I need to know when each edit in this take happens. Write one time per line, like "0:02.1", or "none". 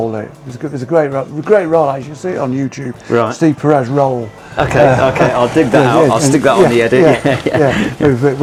none